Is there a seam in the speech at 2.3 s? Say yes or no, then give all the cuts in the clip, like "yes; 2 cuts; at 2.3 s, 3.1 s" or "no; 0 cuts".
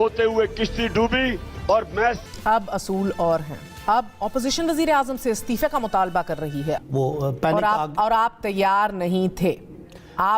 yes; 2 cuts; at 2.3 s, 6.8 s